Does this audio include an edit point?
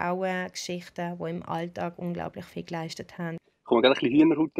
yes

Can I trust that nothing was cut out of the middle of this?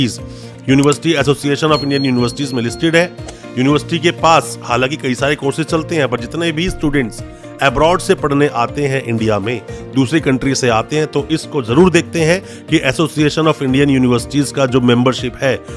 yes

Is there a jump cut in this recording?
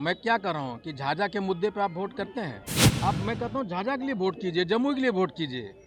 yes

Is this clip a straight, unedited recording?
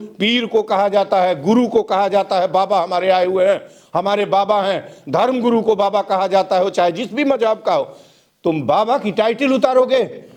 yes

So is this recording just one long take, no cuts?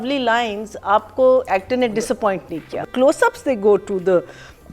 yes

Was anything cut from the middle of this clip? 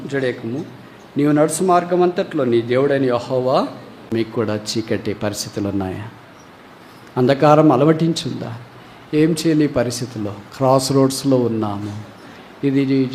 yes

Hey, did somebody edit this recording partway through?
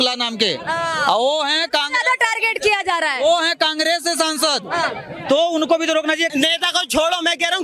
yes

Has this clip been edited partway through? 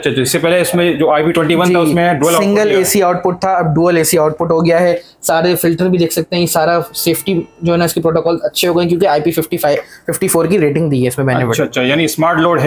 no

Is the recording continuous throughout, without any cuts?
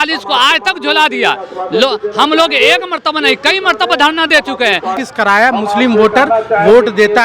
no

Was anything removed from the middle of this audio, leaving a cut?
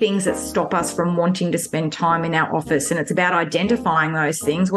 no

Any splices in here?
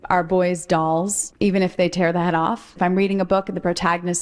yes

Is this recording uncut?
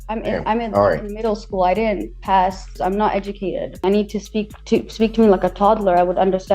no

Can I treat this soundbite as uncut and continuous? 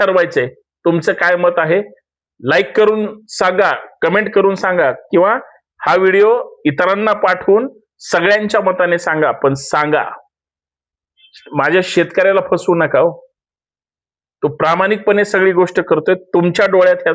yes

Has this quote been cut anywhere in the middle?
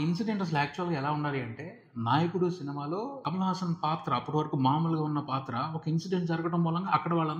no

